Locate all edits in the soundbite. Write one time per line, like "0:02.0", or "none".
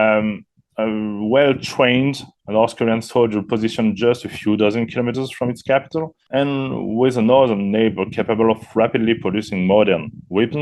0:06.2